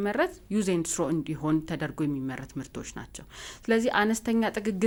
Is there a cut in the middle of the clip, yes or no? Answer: no